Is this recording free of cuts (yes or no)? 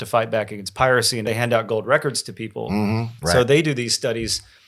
no